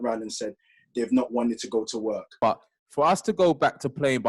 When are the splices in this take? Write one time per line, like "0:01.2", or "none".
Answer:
0:02.3